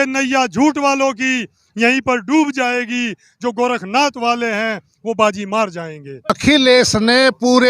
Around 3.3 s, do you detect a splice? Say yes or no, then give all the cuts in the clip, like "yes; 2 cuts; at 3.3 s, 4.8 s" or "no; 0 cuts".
no; 1 cut; at 6.4 s